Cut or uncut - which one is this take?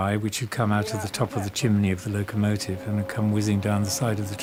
uncut